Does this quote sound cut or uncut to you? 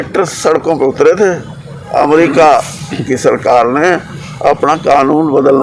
uncut